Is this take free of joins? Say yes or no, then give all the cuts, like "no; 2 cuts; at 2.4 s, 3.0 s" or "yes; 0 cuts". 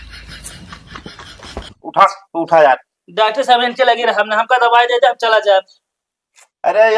no; 1 cut; at 1.0 s